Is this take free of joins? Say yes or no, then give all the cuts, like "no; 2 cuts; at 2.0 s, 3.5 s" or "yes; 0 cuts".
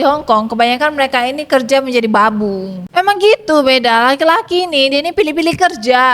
no; 1 cut; at 2.8 s